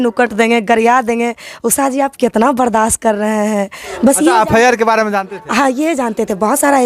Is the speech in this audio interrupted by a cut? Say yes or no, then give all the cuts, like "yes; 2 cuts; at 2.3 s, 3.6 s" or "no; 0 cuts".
yes; 1 cut; at 3.8 s